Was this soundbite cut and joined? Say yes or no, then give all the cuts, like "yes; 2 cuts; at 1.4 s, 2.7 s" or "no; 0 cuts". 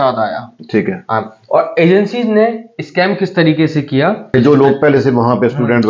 yes; 1 cut; at 4.3 s